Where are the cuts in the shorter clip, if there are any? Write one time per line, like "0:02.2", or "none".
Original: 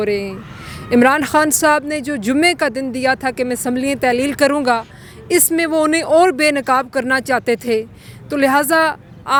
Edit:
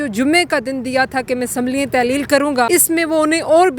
0:02.7